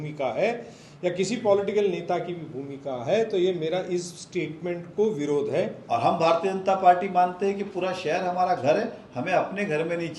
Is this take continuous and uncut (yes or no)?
no